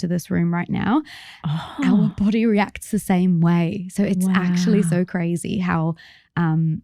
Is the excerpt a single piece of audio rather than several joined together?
yes; 0 cuts

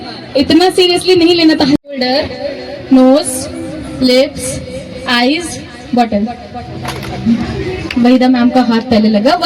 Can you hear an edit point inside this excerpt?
yes; 1 cut; at 1.8 s

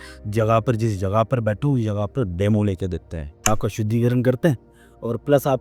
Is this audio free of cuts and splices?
no; 1 cut; at 3.5 s

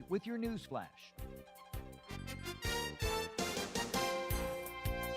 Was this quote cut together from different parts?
yes; 1 cut; at 1.0 s

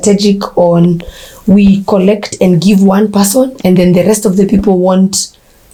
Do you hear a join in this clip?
no; 0 cuts

